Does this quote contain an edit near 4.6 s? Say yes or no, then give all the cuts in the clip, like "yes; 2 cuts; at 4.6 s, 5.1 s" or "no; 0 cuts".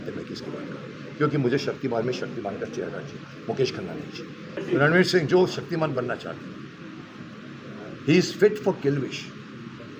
yes; 1 cut; at 4.6 s